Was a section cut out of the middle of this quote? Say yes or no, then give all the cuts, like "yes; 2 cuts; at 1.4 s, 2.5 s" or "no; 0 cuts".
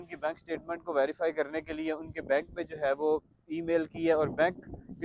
no; 0 cuts